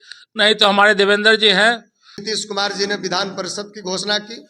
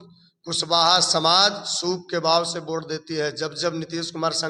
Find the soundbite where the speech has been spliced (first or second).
first